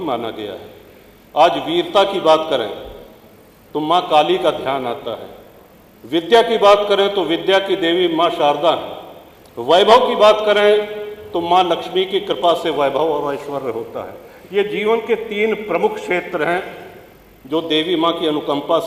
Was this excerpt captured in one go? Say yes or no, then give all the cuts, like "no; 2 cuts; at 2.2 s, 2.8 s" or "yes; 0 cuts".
yes; 0 cuts